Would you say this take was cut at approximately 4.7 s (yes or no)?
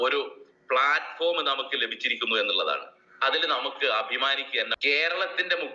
yes